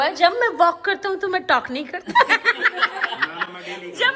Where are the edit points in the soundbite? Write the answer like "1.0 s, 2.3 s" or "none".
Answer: none

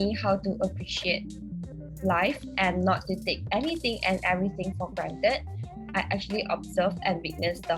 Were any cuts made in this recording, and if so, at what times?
5.8 s

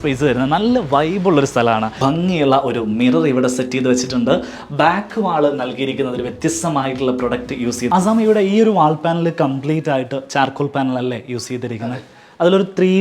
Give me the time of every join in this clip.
2.0 s, 7.9 s

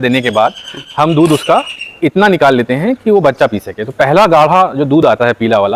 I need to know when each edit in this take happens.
none

